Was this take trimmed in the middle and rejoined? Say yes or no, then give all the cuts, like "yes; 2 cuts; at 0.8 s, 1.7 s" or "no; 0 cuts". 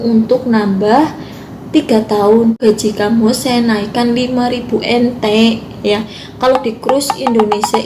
yes; 1 cut; at 2.6 s